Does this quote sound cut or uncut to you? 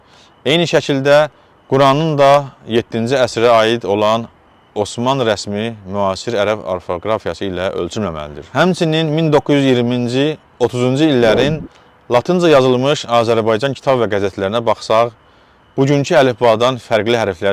uncut